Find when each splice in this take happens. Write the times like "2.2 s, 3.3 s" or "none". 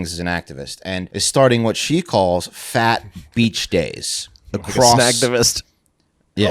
1.2 s